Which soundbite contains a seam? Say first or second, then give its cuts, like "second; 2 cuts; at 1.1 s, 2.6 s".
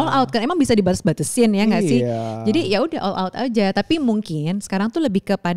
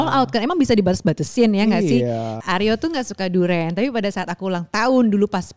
second; 1 cut; at 2.4 s